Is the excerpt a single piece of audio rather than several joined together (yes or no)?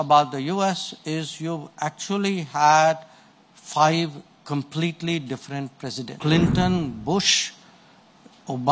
no